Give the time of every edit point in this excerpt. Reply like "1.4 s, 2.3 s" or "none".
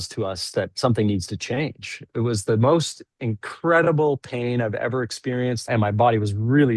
2.1 s, 5.7 s

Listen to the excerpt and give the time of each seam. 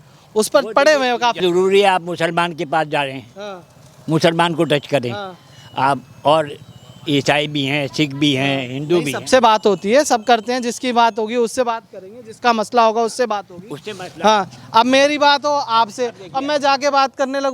1.4 s

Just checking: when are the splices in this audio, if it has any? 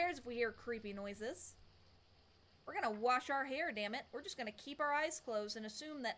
none

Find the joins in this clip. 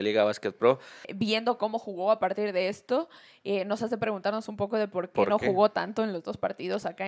1.1 s

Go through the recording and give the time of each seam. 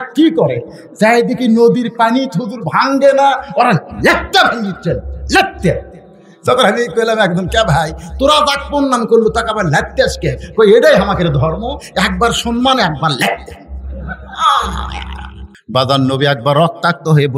15.6 s

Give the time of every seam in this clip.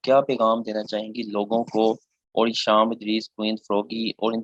none

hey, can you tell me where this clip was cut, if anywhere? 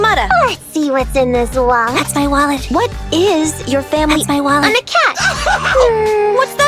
none

